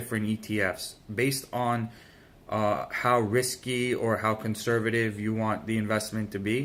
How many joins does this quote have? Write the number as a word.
zero